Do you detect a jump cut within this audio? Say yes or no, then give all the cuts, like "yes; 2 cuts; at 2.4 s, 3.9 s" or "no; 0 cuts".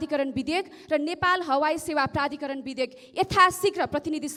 no; 0 cuts